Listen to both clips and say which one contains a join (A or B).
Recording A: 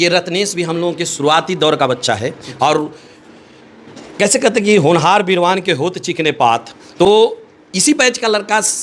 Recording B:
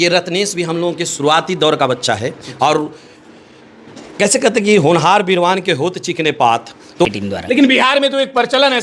B